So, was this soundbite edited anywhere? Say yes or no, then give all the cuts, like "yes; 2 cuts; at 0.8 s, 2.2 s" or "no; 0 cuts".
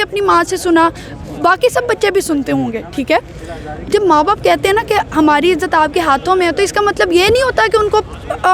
no; 0 cuts